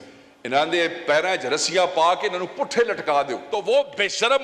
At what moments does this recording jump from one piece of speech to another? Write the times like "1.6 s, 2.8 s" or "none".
3.4 s

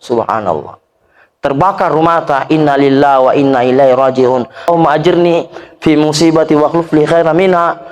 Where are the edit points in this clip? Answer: 4.7 s

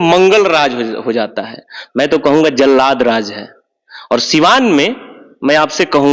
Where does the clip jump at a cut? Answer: none

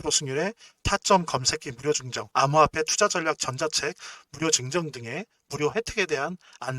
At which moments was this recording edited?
2.2 s

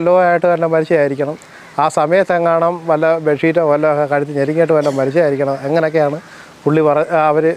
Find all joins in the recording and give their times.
none

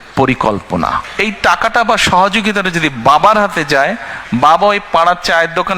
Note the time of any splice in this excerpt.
1.1 s

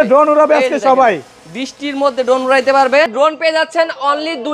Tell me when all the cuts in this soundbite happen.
3.1 s

